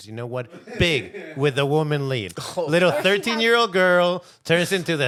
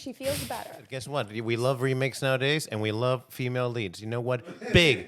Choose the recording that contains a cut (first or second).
second